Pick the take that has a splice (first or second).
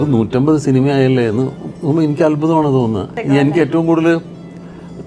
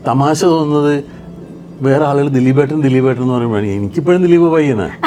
first